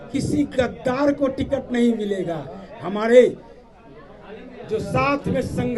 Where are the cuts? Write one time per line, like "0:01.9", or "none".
none